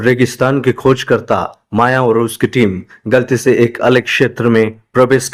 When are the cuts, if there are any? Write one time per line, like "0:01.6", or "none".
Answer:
none